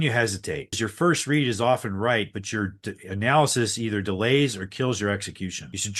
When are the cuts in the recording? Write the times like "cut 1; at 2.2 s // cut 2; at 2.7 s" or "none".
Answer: none